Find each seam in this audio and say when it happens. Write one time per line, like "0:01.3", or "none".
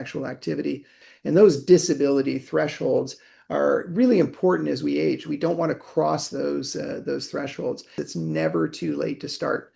0:01.0
0:07.9